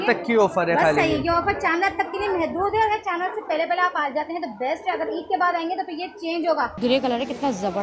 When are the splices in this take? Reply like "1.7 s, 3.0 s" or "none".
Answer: 6.7 s